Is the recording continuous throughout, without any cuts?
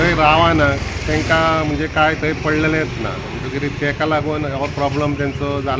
yes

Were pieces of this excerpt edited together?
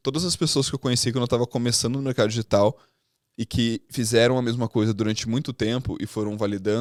no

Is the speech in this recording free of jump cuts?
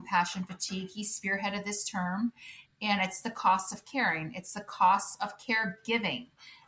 yes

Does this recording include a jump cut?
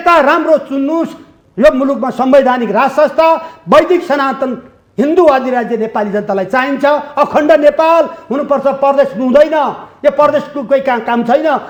no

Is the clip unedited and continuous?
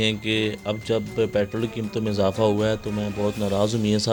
yes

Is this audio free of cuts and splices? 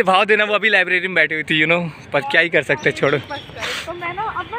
yes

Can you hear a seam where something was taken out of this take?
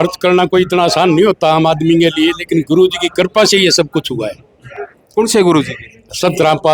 no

